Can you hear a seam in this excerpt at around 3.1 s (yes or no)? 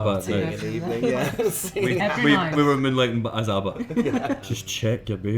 no